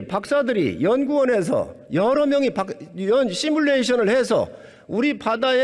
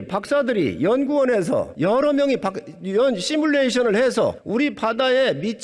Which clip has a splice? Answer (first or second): second